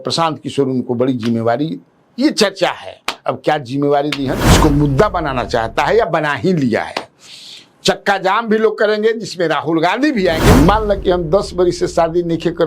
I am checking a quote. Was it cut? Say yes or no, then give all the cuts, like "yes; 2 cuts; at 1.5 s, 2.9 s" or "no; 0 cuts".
yes; 2 cuts; at 4.6 s, 10.5 s